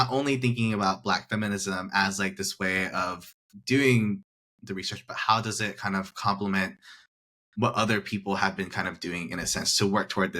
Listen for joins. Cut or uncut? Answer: uncut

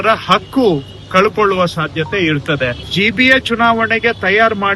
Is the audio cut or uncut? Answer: cut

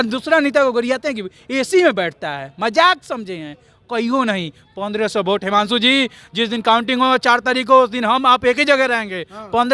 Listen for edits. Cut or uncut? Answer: uncut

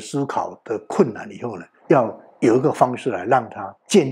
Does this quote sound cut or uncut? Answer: uncut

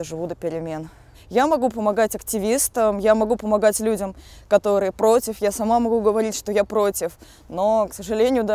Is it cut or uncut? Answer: cut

